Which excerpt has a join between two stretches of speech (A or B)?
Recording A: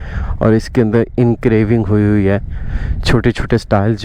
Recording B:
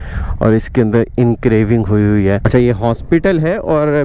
B